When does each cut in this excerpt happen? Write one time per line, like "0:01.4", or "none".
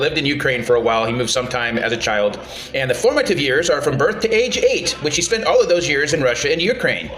none